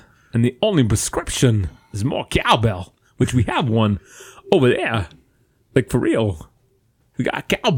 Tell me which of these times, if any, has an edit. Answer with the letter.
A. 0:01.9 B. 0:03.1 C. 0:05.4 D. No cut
D